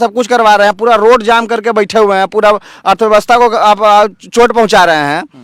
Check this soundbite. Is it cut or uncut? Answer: uncut